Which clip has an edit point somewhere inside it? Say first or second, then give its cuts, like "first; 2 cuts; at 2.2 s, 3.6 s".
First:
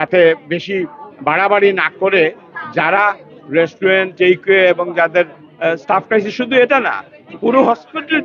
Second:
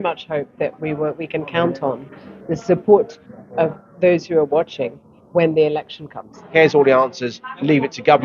second; 1 cut; at 6.4 s